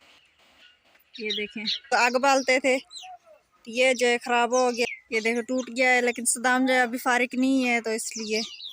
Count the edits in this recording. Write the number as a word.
two